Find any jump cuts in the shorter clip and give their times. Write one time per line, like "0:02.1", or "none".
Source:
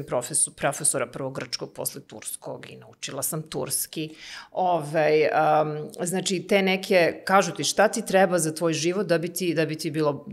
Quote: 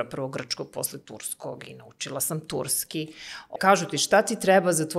0:03.5